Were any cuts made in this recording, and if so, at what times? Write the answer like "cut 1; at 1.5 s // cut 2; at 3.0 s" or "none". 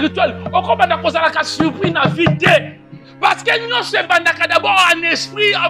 none